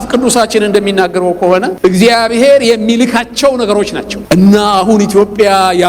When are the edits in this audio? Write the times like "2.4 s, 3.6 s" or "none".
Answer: 1.7 s, 4.1 s